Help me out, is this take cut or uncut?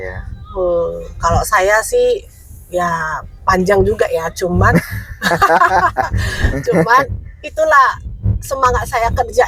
uncut